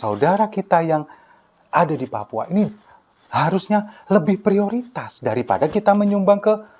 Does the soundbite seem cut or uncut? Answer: uncut